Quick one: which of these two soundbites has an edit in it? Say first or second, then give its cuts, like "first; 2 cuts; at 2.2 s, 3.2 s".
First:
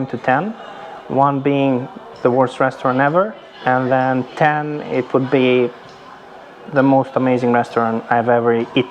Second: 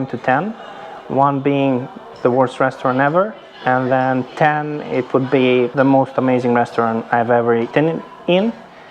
second; 2 cuts; at 5.7 s, 7.7 s